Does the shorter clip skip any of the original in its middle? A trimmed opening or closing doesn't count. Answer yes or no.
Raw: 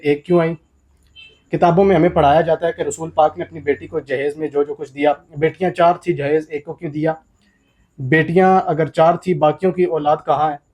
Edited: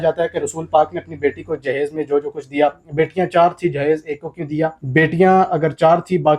yes